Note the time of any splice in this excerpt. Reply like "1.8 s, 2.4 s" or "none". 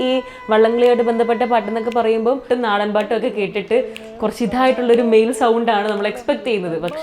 2.4 s